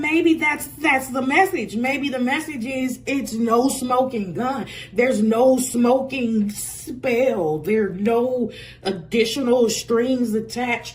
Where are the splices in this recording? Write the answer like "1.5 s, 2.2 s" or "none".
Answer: none